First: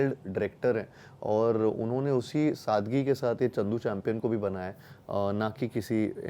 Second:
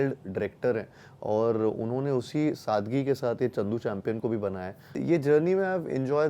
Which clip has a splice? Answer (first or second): second